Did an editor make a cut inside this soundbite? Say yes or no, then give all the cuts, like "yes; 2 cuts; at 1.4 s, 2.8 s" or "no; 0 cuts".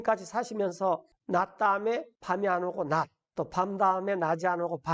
yes; 3 cuts; at 1.1 s, 2.1 s, 3.2 s